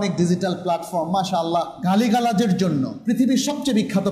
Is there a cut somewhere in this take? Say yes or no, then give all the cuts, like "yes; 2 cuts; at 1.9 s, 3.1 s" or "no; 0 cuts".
yes; 2 cuts; at 1.7 s, 2.9 s